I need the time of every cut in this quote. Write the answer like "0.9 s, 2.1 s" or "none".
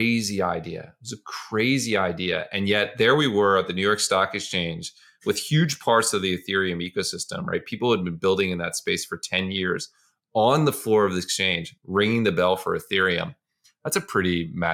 none